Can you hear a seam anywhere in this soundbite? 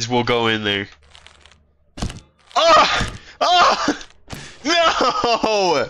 no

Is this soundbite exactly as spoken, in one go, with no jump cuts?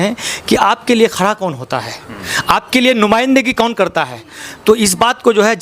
yes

